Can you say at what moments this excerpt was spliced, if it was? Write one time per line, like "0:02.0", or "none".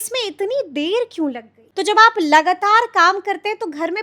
0:01.6

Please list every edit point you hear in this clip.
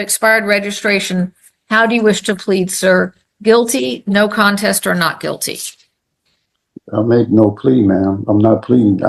none

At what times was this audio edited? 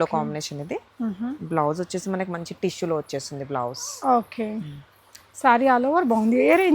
none

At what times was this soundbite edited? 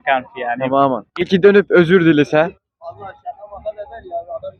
0:01.1

